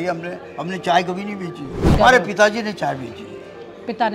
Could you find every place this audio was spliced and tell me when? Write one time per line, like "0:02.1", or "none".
0:02.0